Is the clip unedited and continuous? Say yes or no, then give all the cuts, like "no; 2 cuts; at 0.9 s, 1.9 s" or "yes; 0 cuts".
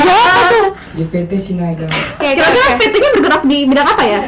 no; 1 cut; at 2.2 s